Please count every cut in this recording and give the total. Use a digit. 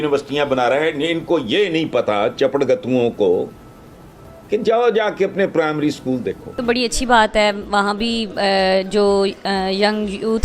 1